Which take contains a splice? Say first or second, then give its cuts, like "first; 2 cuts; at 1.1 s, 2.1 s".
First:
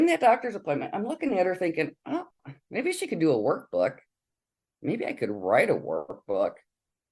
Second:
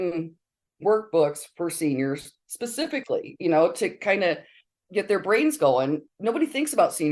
second; 2 cuts; at 2.4 s, 6.1 s